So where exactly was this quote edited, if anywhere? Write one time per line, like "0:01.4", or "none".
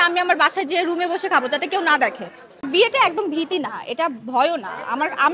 0:02.7